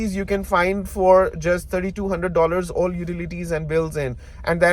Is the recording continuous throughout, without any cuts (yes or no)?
yes